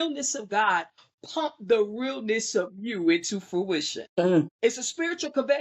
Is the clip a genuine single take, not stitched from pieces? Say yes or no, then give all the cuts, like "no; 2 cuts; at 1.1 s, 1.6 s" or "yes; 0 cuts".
no; 2 cuts; at 4.0 s, 4.5 s